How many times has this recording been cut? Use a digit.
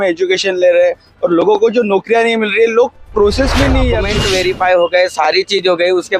1